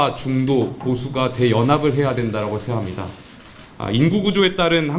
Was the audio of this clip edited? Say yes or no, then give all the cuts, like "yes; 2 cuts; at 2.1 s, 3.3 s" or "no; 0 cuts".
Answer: no; 0 cuts